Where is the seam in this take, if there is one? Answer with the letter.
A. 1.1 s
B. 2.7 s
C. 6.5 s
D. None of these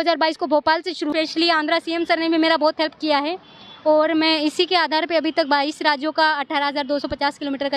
A